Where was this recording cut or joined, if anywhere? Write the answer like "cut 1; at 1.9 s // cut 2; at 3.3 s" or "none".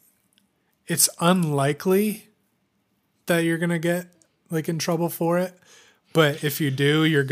none